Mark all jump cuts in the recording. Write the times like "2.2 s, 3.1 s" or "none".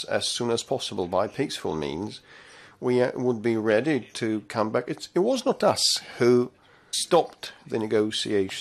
none

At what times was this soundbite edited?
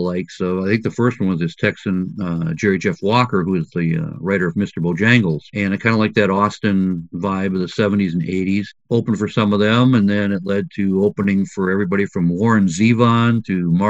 8.7 s

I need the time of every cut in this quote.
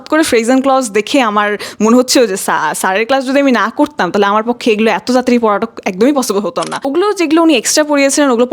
6.9 s

